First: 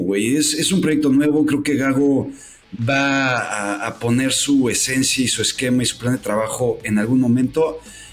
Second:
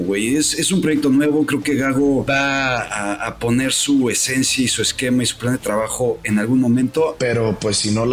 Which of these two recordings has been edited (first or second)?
second